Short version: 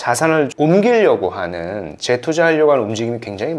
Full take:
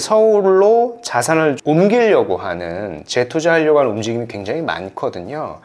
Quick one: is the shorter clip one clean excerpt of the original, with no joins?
yes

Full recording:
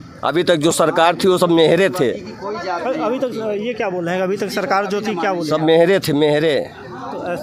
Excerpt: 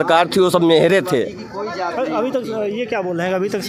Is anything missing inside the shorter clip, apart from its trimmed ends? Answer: no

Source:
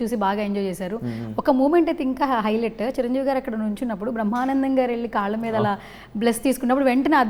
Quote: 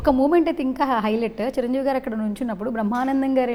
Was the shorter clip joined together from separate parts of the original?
no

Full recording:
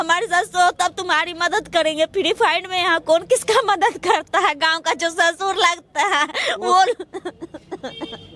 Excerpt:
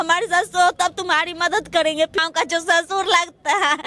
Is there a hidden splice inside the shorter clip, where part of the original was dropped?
yes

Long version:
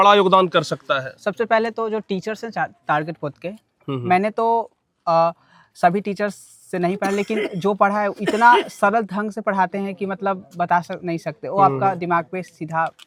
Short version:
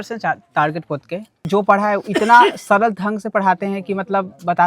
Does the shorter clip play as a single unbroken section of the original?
no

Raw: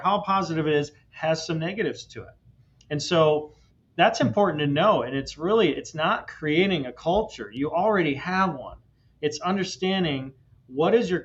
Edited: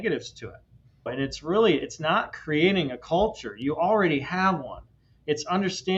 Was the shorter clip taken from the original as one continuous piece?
no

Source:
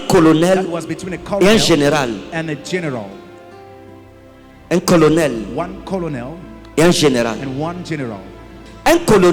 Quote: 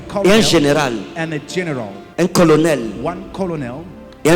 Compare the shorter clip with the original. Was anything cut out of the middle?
yes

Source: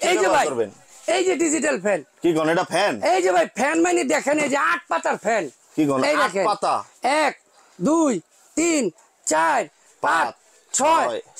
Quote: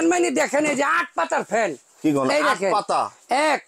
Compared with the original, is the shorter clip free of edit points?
yes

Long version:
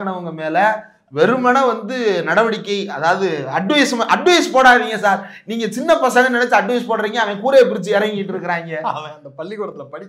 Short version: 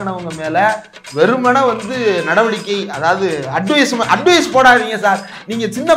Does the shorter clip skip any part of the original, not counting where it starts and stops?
no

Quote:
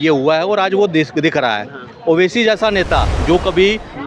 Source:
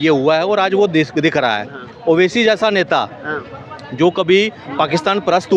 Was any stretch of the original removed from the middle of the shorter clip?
yes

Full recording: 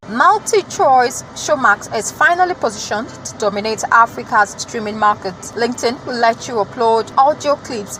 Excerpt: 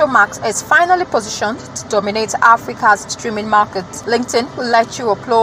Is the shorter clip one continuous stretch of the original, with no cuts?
yes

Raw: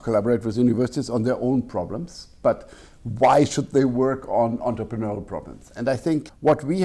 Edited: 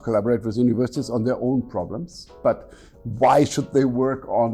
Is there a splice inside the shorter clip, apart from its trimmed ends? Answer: no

